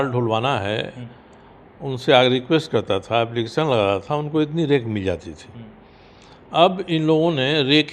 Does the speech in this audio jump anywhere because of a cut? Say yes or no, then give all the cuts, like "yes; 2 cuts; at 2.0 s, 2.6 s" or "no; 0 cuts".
no; 0 cuts